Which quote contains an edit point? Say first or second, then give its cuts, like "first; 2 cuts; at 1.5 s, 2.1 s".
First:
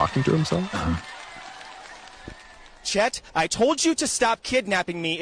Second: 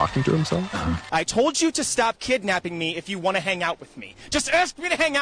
second; 1 cut; at 1.0 s